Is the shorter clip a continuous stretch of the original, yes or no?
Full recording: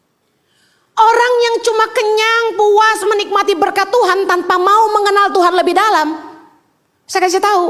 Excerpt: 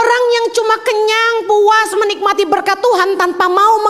yes